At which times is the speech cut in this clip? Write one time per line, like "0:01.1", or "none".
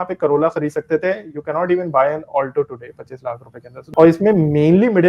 0:03.8